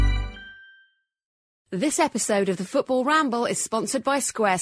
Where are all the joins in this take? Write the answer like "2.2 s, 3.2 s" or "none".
1.5 s